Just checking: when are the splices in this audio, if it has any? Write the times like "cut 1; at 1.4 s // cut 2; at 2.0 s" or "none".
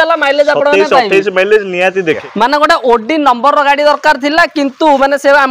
cut 1; at 2.2 s

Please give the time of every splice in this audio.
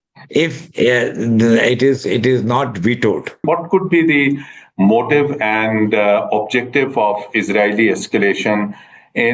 cut 1; at 3.4 s

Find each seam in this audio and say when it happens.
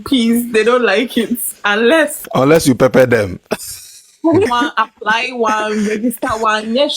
cut 1; at 2.2 s // cut 2; at 4.5 s

